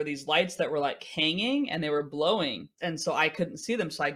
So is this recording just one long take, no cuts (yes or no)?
no